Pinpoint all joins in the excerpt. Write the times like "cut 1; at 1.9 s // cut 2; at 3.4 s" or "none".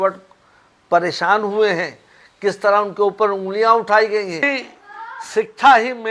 cut 1; at 4.5 s